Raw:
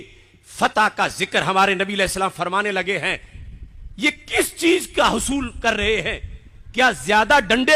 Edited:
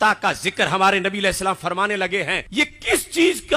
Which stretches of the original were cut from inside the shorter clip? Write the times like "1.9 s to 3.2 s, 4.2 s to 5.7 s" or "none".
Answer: 3.2 s to 3.9 s